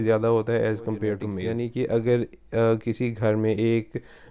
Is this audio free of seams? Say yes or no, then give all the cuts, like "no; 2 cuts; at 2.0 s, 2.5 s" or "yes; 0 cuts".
no; 1 cut; at 1.4 s